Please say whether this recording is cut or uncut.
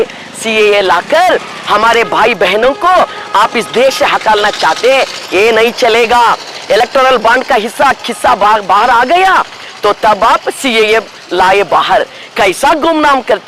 uncut